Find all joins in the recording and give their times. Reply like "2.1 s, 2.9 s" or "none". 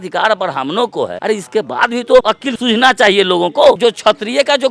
1.2 s, 2.4 s, 3.8 s